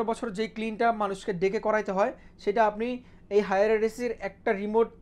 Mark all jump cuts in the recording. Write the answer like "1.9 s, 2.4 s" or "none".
none

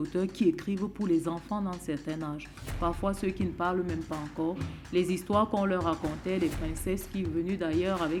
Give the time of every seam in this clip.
none

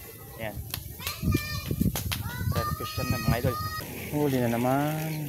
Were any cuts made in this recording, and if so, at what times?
3.8 s

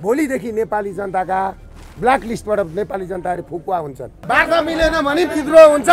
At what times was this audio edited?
4.2 s

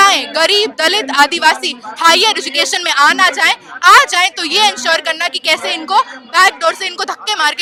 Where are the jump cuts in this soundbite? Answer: none

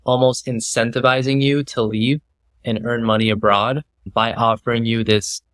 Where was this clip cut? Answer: 4.1 s

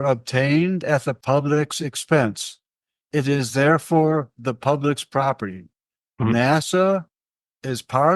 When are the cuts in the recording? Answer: 1.1 s

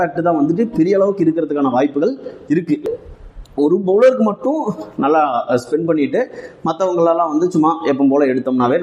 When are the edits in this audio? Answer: 2.8 s

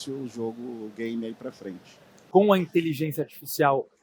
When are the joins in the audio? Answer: 2.1 s

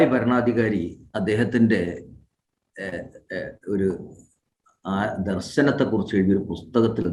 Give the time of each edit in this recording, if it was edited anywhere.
none

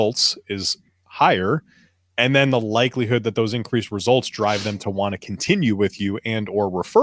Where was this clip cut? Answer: none

